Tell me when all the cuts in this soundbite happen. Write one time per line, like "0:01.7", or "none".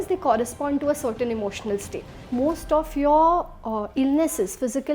0:02.2